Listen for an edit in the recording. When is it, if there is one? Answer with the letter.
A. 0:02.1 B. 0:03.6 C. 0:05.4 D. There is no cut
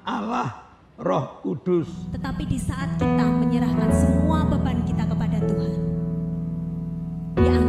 A